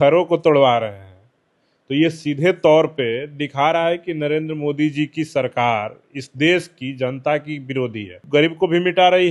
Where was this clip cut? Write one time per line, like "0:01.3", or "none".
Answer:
0:08.2